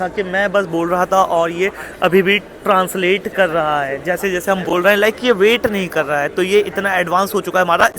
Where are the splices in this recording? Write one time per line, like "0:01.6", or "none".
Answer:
none